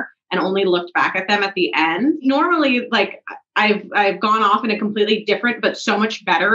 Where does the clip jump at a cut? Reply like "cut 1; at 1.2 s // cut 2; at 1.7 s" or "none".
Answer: cut 1; at 2.2 s